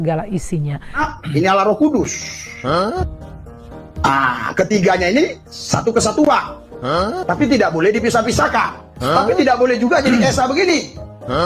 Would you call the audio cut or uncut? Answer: cut